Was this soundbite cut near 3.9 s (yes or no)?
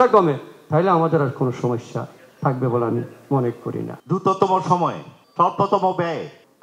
yes